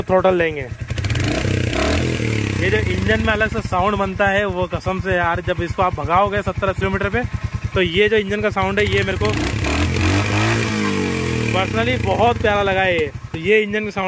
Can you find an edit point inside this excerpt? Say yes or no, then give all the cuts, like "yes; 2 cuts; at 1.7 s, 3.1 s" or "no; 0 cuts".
no; 0 cuts